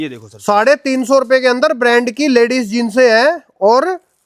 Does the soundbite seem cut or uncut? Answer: uncut